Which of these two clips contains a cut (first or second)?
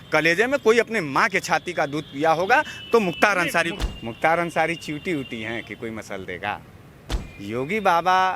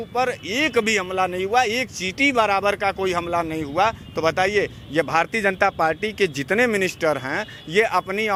first